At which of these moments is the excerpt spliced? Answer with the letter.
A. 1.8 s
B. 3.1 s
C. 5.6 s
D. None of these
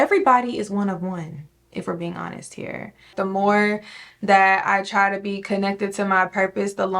B